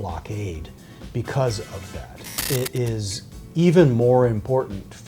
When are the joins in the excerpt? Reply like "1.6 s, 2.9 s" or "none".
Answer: 2.4 s